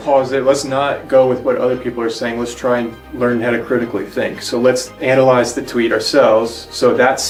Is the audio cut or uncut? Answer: uncut